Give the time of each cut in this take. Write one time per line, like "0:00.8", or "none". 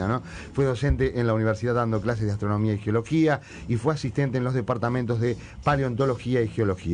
none

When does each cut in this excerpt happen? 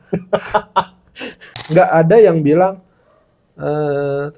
0:01.5

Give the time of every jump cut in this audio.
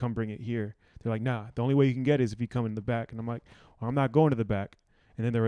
none

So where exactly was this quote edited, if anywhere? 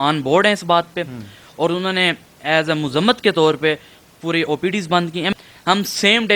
0:05.3

